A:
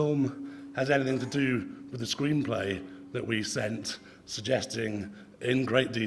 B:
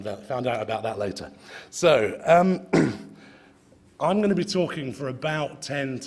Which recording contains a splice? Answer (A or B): B